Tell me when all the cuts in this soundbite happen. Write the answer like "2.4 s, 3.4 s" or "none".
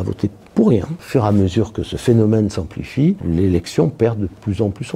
1.0 s, 3.2 s